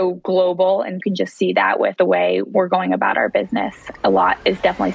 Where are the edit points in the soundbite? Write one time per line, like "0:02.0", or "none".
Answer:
0:01.0
0:02.2
0:03.8